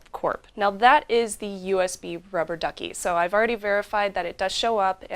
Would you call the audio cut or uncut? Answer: cut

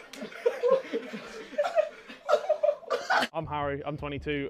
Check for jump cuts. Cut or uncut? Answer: cut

